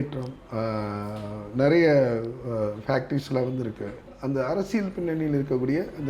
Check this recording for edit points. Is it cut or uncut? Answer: cut